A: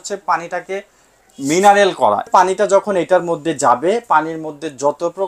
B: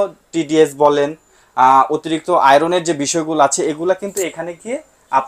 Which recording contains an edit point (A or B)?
A